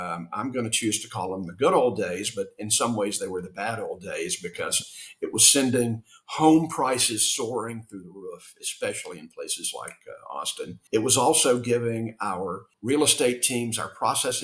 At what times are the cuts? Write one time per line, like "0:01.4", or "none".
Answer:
0:10.7
0:12.7